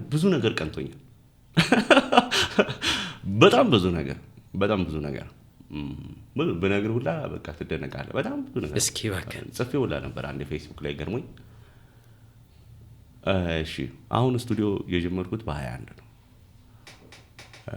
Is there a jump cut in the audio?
no; 0 cuts

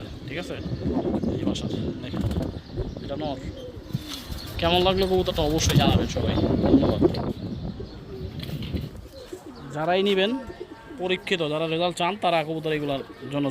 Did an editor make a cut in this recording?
yes; 1 cut; at 8.9 s

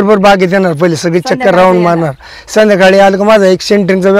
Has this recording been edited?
no; 0 cuts

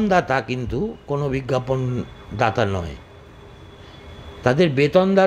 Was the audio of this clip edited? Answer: no; 0 cuts

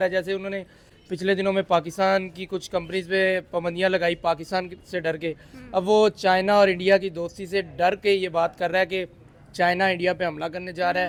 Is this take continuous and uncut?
yes; 0 cuts

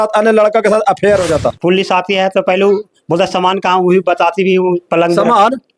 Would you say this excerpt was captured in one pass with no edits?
no; 1 cut; at 1.6 s

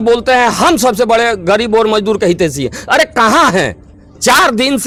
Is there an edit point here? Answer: no; 0 cuts

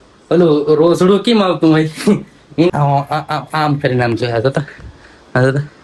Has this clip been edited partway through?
yes; 1 cut; at 2.7 s

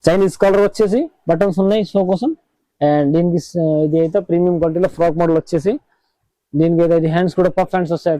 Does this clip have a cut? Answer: no; 0 cuts

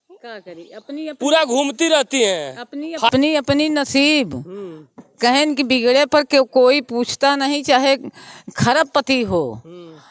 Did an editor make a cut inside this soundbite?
yes; 1 cut; at 3.1 s

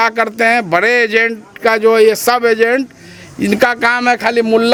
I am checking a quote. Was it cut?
no; 0 cuts

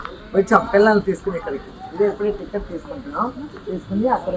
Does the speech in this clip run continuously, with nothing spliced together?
yes; 0 cuts

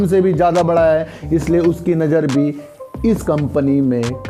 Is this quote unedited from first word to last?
yes; 0 cuts

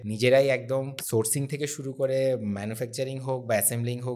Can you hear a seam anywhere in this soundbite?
yes; 1 cut; at 1.0 s

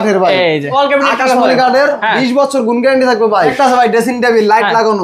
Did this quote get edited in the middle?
yes; 2 cuts; at 0.7 s, 3.5 s

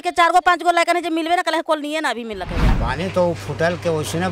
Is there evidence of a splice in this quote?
yes; 1 cut; at 2.8 s

